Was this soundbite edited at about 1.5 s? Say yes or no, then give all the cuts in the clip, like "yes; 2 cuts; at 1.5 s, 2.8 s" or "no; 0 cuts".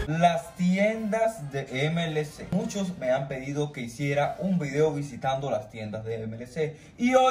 no; 0 cuts